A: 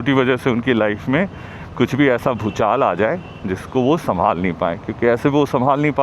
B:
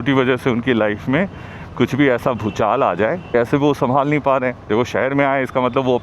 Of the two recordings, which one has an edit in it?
B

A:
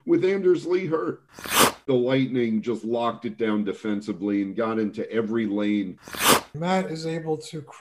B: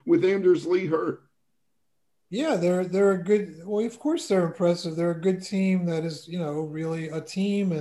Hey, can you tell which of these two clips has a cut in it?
A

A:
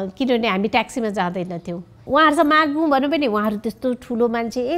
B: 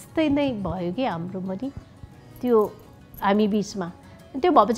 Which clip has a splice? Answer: A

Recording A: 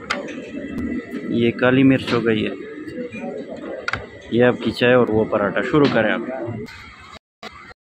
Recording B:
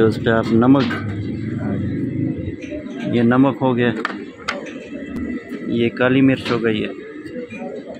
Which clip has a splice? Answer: A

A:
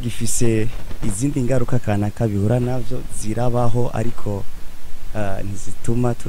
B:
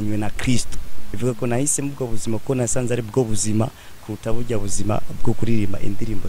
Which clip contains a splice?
B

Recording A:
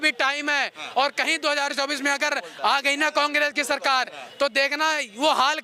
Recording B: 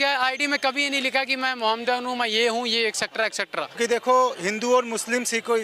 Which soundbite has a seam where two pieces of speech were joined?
B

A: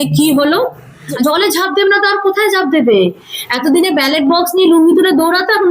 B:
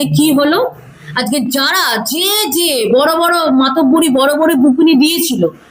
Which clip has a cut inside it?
A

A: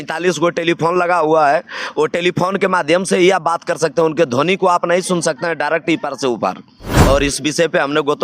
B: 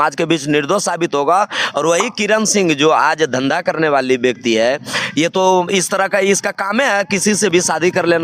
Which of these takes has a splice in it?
A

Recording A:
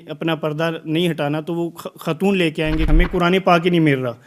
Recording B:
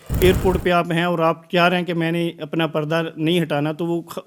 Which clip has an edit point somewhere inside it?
A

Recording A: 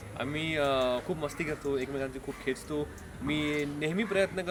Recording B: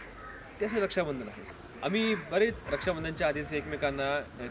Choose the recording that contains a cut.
B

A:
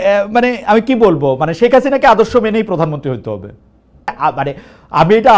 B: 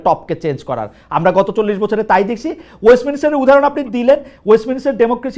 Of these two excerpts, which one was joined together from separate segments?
A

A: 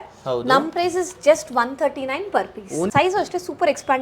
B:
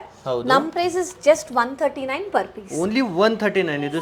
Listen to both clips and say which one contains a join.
A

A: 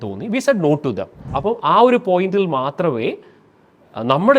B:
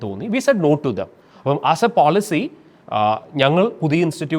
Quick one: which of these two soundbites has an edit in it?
A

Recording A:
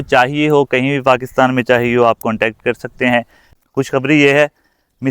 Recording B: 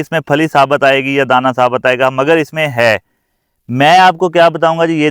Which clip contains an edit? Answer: A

